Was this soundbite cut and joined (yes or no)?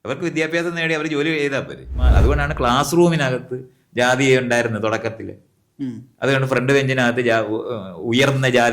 yes